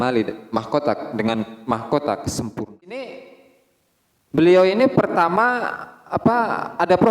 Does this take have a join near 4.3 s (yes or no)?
no